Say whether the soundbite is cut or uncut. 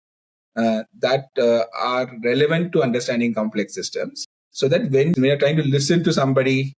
cut